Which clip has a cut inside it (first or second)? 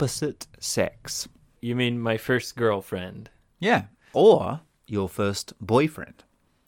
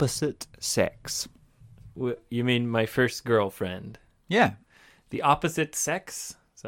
first